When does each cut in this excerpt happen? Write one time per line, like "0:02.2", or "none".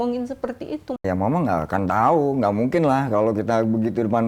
0:01.0